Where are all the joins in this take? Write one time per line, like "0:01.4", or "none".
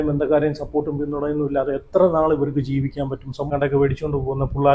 0:03.5

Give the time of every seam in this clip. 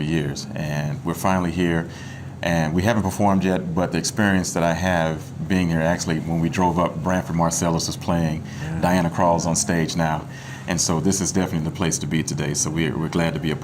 0:08.4

